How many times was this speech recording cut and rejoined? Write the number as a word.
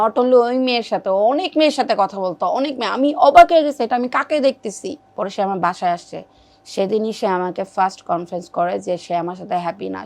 one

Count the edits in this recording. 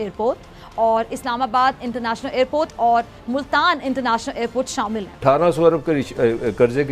one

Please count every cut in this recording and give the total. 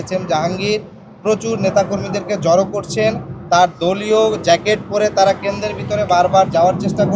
zero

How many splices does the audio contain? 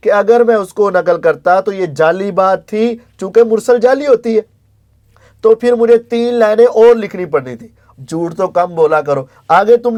zero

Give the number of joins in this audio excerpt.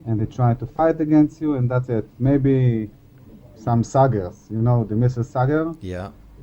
zero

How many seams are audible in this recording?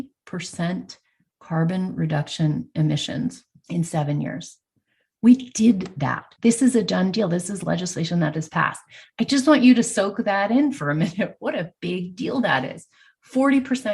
one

